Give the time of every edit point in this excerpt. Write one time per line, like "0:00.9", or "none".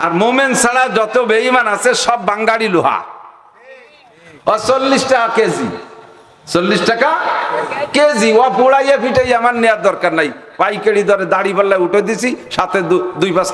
none